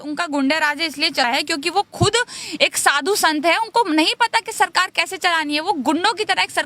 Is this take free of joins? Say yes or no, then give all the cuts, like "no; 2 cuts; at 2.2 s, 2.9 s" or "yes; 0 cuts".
no; 1 cut; at 1.2 s